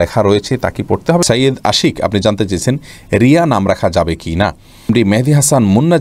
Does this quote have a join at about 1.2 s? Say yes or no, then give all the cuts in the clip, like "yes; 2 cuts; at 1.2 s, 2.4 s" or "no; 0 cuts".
yes; 2 cuts; at 1.2 s, 4.8 s